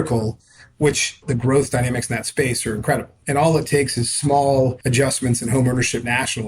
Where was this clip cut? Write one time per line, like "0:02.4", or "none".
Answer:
0:01.2
0:03.2
0:04.8